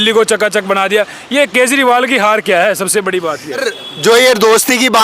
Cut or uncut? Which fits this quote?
cut